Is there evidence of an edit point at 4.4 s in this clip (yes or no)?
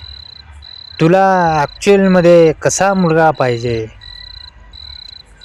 no